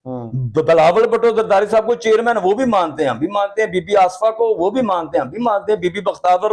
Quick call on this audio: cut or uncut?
uncut